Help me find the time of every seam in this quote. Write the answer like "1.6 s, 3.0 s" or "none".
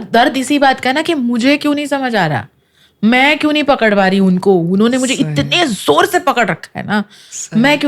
none